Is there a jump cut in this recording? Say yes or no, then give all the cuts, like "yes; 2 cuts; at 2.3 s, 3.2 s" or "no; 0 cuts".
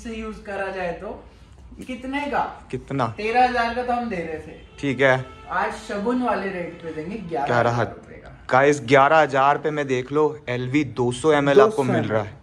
no; 0 cuts